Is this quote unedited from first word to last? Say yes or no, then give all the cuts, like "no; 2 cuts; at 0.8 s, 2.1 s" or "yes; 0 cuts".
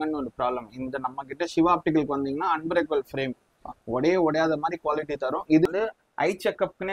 no; 1 cut; at 5.7 s